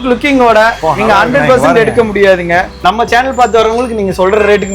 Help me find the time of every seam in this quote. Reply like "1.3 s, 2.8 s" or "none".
2.7 s